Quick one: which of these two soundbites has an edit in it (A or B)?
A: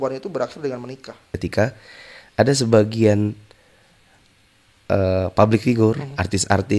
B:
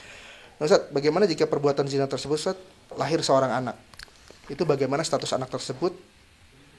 A